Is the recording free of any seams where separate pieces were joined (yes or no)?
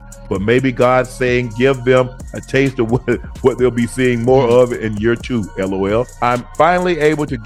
yes